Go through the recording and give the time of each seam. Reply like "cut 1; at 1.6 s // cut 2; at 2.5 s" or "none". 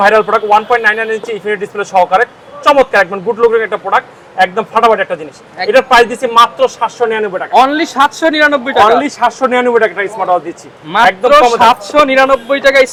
none